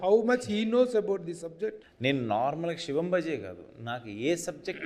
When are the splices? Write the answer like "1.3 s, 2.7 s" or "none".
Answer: 1.9 s